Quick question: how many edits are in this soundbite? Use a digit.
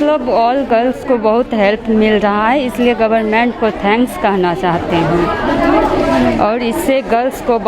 0